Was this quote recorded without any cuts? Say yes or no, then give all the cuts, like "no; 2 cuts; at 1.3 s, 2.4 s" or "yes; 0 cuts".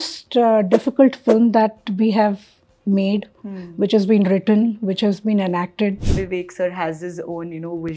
no; 1 cut; at 6.0 s